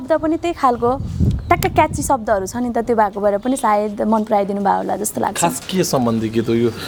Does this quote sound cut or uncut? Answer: uncut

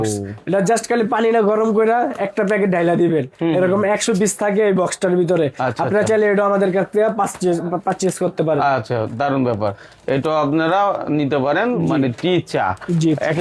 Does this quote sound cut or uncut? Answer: uncut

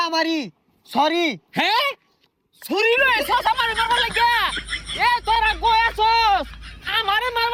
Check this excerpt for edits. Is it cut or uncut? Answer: uncut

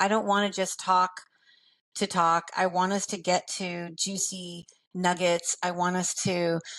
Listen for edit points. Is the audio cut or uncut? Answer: uncut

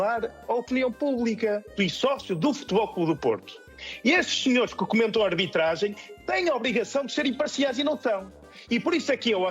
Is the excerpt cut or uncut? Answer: cut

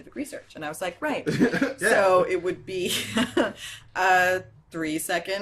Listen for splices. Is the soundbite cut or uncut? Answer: cut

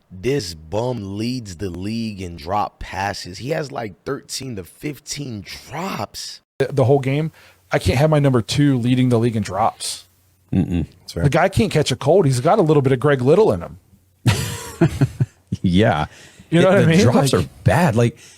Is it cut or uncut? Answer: cut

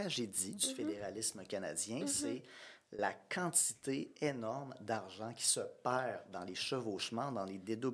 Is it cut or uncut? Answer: uncut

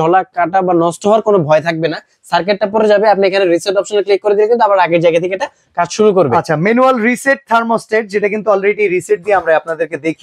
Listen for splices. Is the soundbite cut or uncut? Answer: uncut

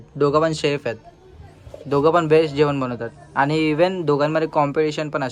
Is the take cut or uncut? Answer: uncut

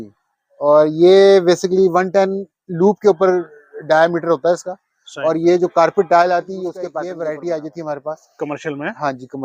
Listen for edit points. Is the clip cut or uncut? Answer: cut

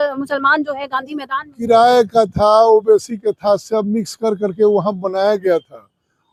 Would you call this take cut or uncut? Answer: uncut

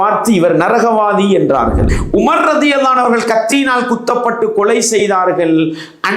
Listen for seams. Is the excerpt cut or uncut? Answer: cut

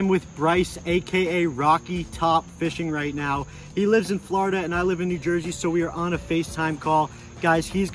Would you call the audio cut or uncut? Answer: uncut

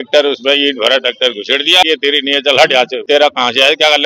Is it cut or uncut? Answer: cut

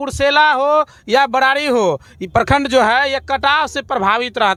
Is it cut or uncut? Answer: uncut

